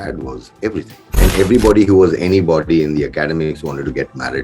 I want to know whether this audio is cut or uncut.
cut